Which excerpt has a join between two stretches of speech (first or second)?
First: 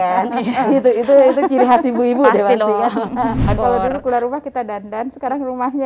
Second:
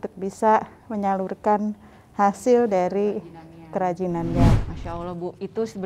first